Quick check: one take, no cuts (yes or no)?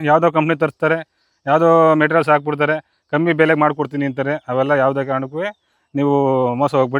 yes